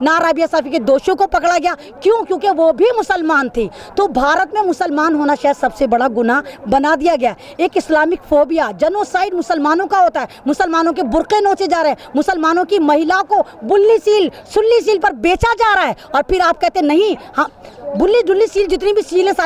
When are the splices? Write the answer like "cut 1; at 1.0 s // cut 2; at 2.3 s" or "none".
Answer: none

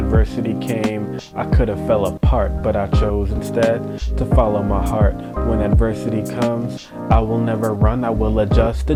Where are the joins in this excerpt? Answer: none

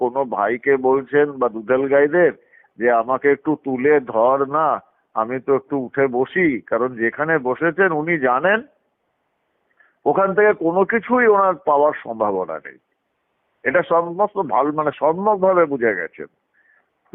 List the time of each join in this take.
none

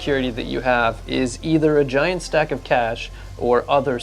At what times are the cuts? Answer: none

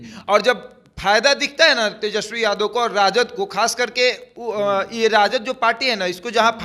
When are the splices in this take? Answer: none

